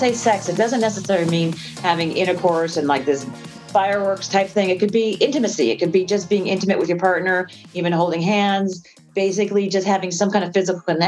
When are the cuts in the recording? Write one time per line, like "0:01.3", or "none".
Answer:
0:03.5